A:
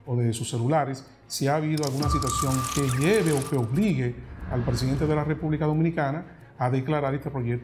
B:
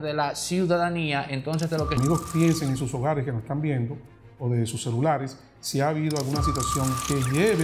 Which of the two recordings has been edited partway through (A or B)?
B